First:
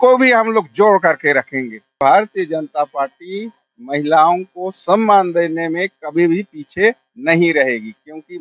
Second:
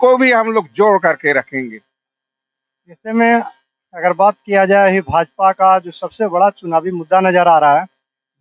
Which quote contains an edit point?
first; 1 cut; at 2.0 s

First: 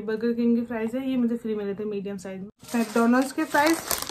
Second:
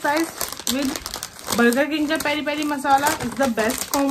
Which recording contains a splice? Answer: first; 1 cut; at 2.5 s

